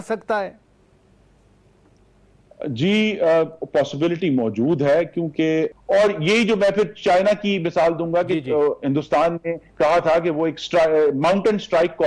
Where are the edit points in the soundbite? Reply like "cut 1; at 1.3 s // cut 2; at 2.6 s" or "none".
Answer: cut 1; at 5.8 s